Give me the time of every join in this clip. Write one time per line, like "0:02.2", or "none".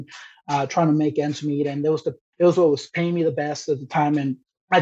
0:02.2